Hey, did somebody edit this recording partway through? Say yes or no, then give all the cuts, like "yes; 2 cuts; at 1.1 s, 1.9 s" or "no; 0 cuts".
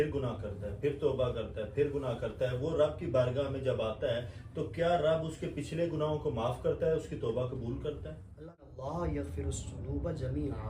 yes; 1 cut; at 8.7 s